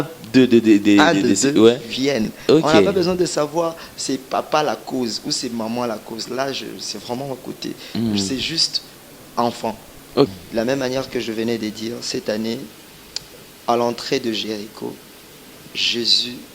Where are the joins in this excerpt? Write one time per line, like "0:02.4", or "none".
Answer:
0:10.3